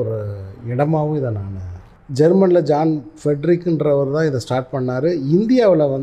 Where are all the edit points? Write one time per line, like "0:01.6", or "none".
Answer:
0:02.0